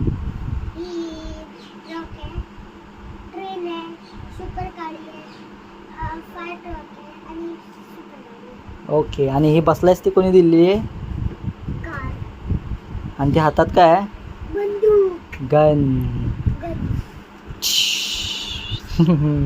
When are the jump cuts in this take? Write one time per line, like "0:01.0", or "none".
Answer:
0:18.1